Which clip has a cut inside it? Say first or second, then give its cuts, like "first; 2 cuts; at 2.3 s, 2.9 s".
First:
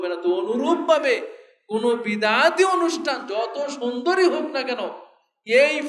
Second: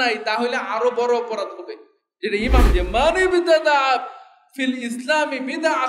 second; 1 cut; at 2.7 s